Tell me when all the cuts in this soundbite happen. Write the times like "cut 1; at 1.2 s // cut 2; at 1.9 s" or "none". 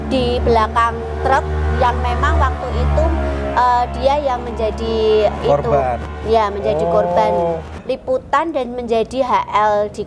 cut 1; at 7.7 s